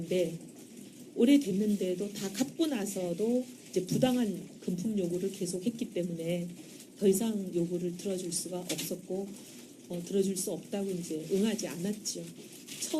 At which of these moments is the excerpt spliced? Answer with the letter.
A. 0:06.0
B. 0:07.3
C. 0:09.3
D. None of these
B